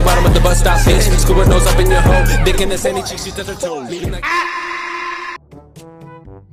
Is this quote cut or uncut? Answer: cut